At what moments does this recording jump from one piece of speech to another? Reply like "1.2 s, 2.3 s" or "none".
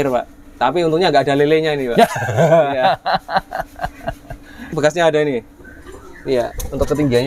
4.7 s